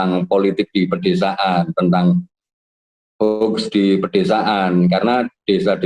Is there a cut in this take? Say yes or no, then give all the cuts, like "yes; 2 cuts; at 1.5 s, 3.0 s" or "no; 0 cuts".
no; 0 cuts